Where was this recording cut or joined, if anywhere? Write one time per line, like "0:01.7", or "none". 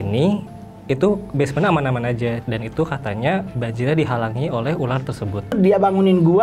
0:02.4
0:03.5
0:05.5